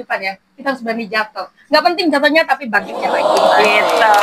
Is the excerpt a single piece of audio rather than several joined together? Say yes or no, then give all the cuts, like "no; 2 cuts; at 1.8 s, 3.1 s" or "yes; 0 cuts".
yes; 0 cuts